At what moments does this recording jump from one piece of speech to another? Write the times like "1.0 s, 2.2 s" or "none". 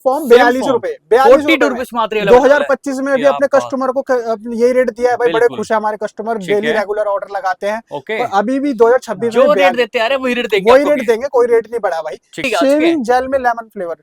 12.4 s